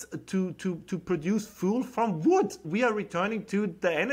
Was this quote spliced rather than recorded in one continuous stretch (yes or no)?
yes